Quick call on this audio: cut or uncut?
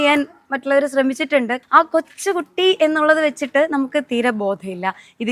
cut